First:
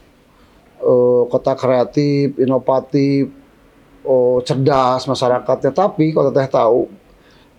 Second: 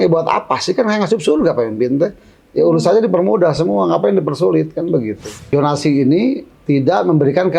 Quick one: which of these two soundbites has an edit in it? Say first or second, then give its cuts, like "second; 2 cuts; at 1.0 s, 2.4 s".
second; 1 cut; at 5.5 s